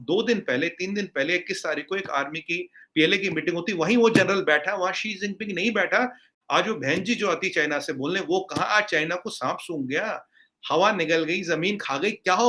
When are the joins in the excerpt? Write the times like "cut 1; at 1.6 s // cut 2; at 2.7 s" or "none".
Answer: cut 1; at 6.4 s